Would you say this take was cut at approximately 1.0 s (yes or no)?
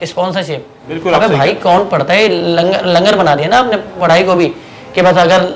yes